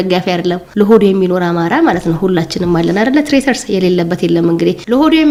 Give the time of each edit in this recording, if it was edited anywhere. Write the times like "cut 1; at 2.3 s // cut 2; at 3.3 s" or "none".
none